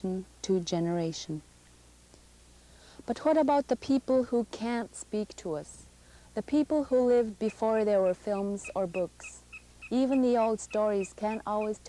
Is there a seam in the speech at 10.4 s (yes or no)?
yes